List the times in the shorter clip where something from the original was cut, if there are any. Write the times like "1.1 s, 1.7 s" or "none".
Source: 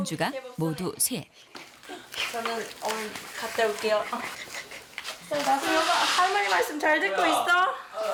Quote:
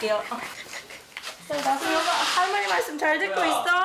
none